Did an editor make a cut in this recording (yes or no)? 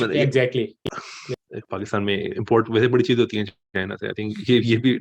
yes